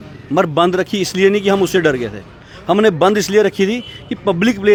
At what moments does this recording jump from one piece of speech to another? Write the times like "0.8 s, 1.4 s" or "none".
none

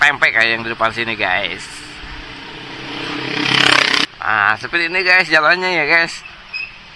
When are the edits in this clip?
4.1 s

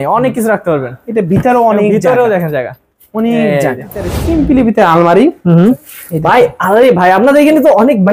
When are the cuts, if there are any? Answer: 4.2 s, 5.8 s

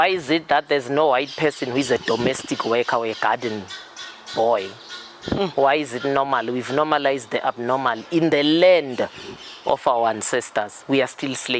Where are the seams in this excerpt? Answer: none

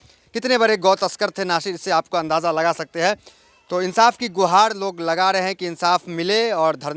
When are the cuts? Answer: none

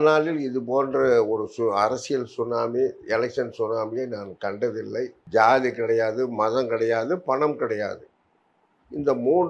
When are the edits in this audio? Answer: 5.2 s

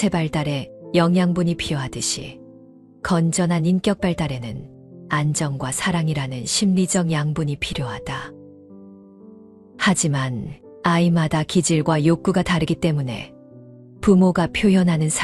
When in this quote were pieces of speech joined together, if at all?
none

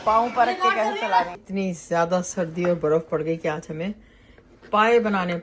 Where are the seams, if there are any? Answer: 1.4 s

